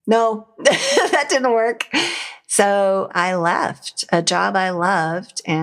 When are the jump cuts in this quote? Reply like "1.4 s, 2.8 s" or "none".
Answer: 3.1 s